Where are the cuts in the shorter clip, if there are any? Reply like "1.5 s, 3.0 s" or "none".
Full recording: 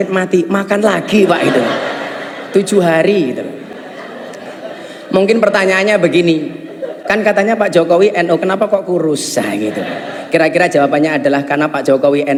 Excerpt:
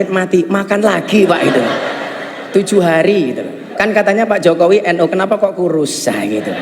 3.6 s